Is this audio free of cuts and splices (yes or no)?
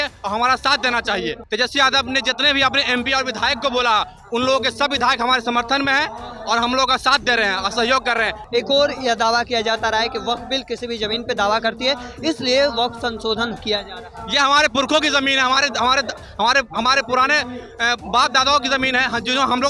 no